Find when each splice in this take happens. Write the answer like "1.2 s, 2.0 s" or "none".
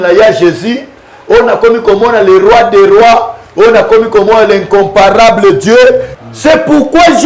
6.1 s